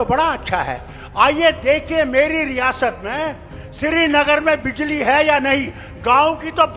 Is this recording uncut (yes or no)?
yes